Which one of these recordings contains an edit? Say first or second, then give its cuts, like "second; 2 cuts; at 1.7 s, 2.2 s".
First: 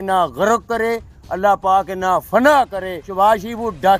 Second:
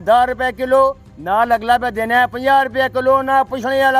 first; 1 cut; at 2.4 s